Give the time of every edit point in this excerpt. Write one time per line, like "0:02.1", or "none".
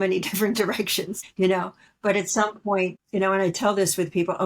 0:01.2
0:03.0